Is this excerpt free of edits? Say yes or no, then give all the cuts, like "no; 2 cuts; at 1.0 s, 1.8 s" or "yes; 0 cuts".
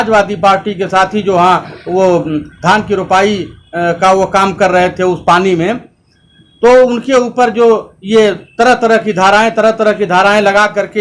yes; 0 cuts